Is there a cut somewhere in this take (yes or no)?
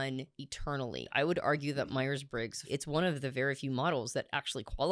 yes